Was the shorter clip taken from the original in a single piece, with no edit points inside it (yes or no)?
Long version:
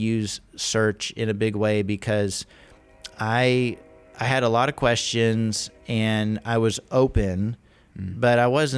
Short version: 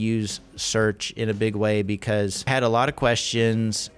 no